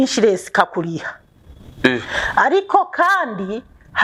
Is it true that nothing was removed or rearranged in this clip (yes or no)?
yes